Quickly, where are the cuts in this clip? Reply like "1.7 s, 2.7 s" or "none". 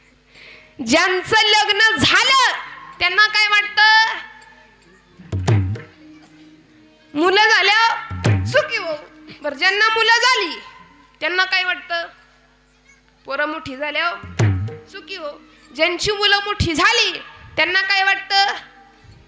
none